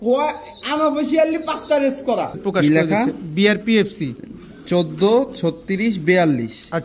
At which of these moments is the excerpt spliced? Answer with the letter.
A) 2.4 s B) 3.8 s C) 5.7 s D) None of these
A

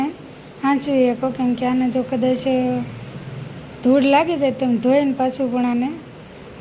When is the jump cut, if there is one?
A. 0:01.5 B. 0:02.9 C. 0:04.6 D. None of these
D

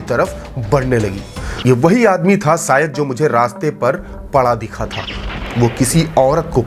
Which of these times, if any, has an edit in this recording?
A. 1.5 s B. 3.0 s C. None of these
A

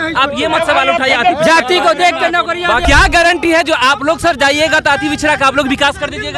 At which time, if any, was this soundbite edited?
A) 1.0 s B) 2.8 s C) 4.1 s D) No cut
B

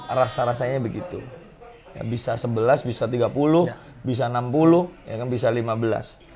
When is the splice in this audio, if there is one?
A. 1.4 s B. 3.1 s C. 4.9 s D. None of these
D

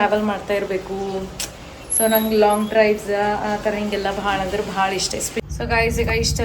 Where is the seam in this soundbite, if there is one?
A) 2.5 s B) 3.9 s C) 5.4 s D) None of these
C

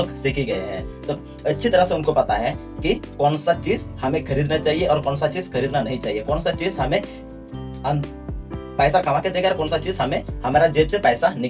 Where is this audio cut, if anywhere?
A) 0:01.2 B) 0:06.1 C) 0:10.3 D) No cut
A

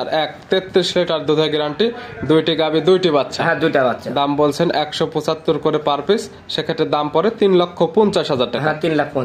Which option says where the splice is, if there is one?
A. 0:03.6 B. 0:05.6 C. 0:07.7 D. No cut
D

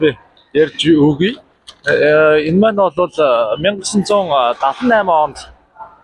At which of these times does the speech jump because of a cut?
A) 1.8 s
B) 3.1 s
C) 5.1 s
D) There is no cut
D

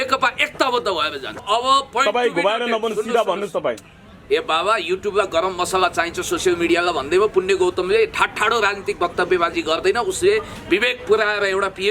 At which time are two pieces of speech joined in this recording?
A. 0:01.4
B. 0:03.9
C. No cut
A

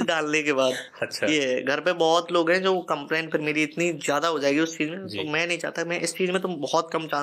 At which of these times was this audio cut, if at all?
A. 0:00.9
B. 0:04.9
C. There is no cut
C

